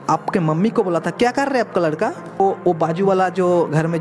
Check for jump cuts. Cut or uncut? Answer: cut